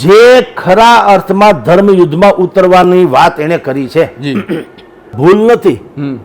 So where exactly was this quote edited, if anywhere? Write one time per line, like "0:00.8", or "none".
0:05.1